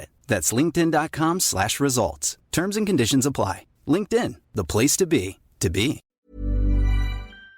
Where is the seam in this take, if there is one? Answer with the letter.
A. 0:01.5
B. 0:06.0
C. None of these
B